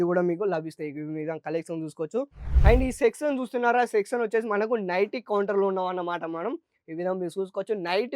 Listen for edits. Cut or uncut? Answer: cut